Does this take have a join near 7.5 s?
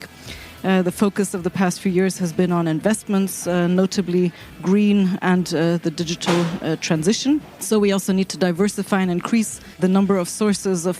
yes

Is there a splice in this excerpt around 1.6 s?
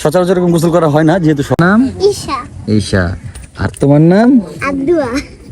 yes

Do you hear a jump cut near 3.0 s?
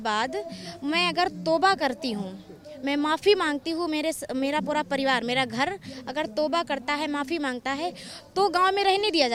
no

